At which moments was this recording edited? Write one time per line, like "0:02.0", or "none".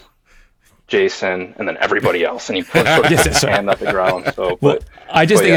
none